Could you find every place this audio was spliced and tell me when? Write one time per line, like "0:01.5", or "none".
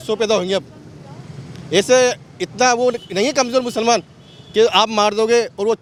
none